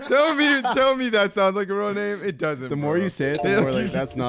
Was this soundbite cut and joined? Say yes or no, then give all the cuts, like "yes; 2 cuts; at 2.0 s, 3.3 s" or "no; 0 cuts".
no; 0 cuts